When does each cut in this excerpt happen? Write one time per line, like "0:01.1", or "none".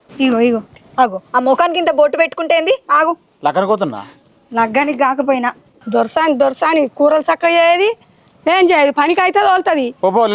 0:05.6